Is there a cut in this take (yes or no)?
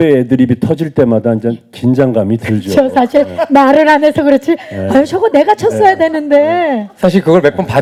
no